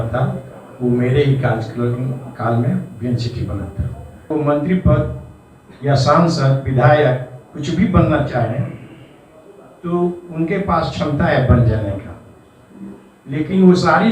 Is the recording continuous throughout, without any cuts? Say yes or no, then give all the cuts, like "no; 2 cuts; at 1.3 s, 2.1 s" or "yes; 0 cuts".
no; 1 cut; at 4.3 s